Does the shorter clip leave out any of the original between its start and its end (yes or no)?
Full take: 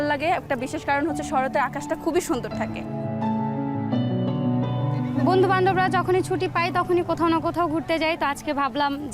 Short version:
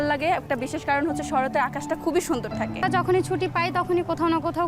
yes